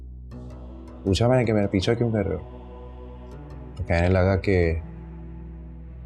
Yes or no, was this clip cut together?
no